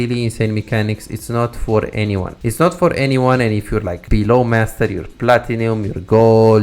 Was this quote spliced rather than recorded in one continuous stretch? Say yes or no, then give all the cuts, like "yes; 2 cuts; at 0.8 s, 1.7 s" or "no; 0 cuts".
yes; 2 cuts; at 2.3 s, 4.0 s